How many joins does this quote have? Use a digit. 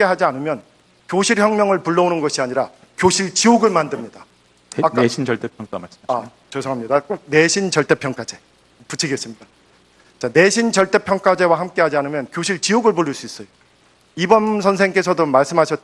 0